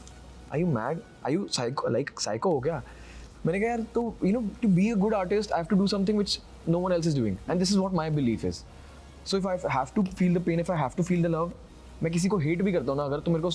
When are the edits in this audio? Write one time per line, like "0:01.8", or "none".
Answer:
none

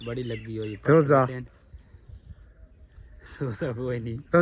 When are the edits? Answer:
none

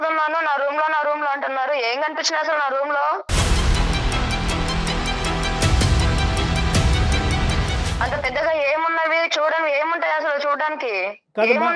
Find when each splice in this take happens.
0:03.3

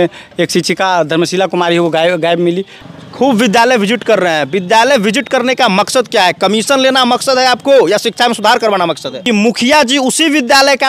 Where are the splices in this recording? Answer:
0:02.7
0:09.1

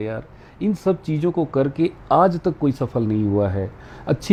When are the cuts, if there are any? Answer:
none

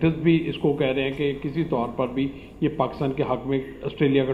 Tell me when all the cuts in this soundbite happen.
none

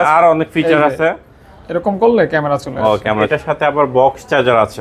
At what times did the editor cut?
0:03.3

